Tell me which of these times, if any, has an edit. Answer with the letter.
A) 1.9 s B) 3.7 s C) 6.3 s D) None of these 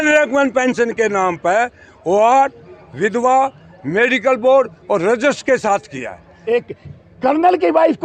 C